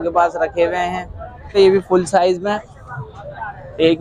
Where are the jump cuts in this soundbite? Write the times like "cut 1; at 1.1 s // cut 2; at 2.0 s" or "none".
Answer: cut 1; at 1.6 s